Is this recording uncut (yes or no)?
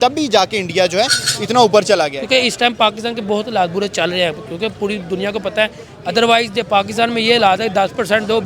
no